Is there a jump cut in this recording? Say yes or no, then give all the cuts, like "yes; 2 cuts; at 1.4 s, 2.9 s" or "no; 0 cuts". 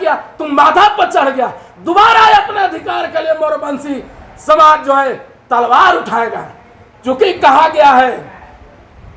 no; 0 cuts